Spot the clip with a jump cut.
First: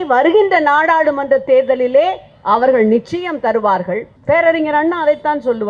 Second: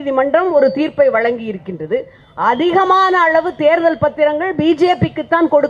first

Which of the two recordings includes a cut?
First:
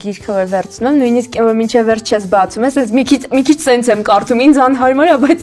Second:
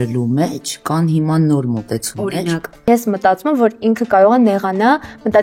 second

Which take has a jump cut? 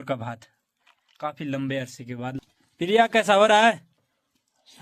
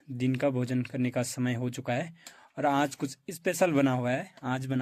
first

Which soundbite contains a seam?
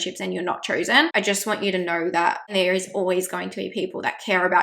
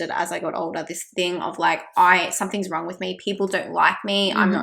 first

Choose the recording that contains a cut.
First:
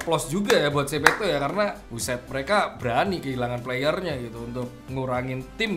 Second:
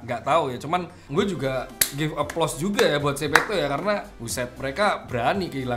second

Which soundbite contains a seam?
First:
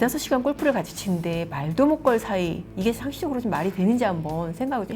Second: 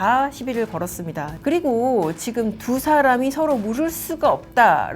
second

